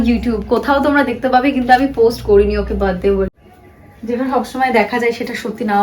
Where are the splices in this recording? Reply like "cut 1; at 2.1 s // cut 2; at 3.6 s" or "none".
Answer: cut 1; at 3.3 s